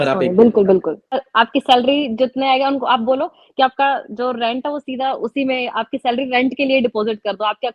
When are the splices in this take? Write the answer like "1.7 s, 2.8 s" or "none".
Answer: 1.2 s